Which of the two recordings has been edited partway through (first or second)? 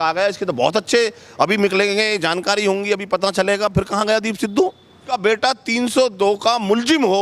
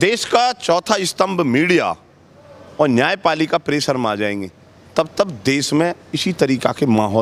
first